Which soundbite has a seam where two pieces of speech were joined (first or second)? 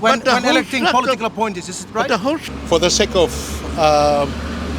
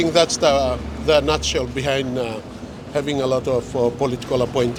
first